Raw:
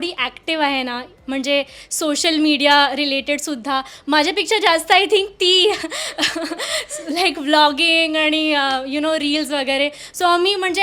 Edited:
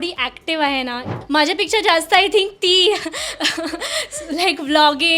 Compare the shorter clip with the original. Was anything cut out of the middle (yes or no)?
yes